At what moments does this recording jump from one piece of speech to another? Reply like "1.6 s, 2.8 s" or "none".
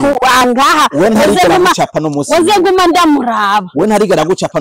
none